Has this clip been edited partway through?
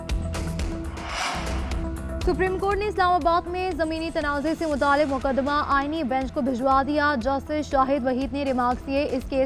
yes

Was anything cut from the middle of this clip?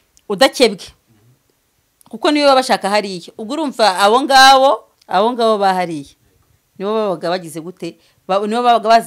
yes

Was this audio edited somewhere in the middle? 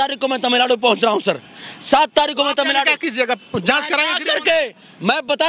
no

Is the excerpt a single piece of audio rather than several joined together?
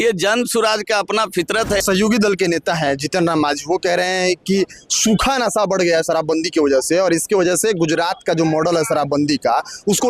no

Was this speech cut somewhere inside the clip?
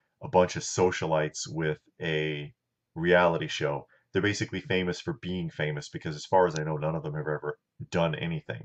no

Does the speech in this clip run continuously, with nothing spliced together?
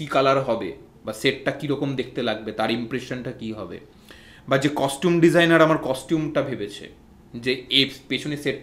yes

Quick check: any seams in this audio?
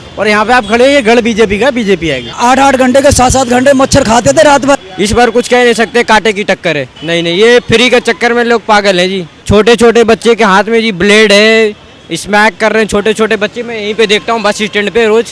yes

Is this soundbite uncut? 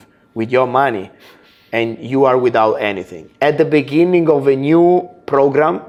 yes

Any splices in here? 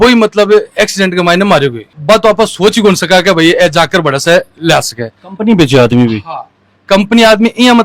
no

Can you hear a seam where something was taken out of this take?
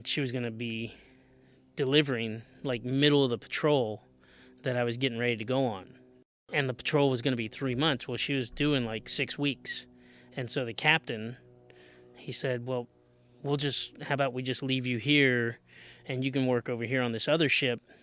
yes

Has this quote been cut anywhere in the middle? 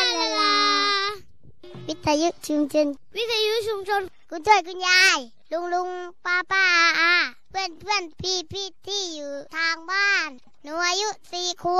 yes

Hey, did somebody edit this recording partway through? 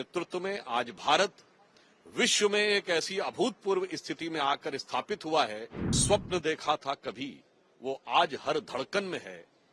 yes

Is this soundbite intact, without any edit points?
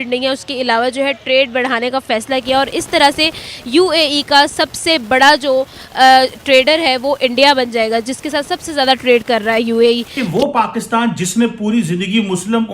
no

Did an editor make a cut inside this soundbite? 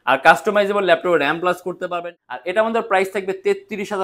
yes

